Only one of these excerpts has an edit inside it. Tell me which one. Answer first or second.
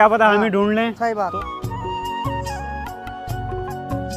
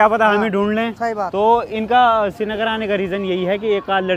first